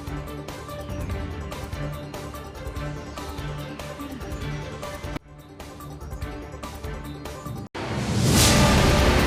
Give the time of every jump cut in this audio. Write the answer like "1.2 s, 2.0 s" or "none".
none